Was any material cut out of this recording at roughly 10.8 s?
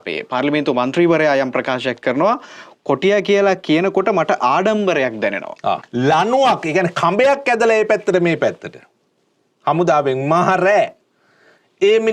no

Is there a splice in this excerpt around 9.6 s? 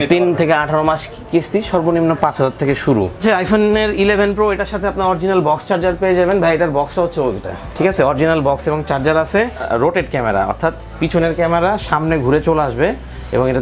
yes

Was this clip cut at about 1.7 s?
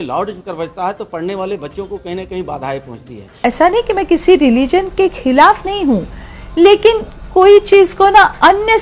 no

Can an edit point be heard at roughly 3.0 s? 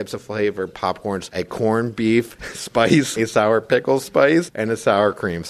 yes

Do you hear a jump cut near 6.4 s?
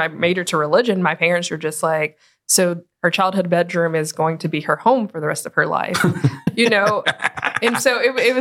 yes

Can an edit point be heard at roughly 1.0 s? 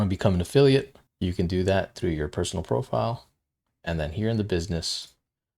yes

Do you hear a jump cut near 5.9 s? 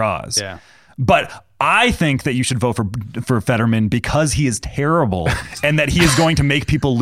no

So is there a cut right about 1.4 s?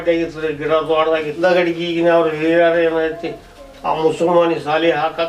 yes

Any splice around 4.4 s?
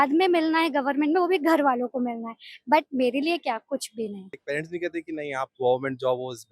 yes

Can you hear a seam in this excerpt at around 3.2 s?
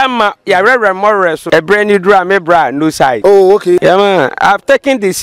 yes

